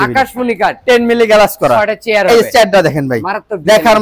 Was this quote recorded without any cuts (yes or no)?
yes